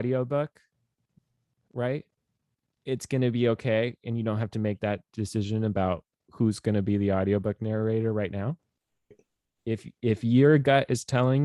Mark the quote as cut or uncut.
cut